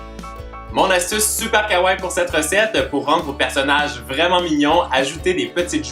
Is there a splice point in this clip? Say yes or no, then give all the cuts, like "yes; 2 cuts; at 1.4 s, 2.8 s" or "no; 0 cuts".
yes; 1 cut; at 3.0 s